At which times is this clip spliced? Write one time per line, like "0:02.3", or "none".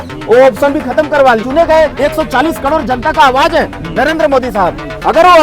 0:01.4